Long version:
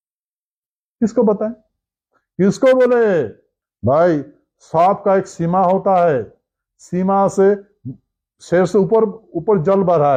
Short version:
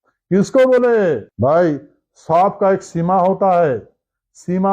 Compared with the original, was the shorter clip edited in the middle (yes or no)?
yes